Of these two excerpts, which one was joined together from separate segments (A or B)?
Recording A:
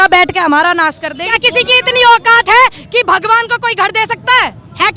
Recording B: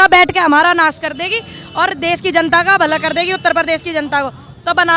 A